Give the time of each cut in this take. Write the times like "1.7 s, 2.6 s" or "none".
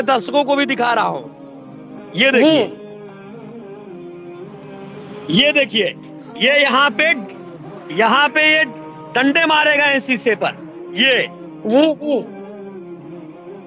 2.7 s, 5.2 s, 12.2 s